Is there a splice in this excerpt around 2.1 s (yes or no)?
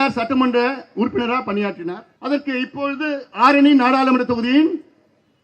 yes